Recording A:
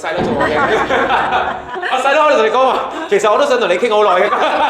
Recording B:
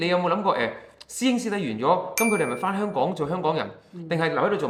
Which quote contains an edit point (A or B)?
A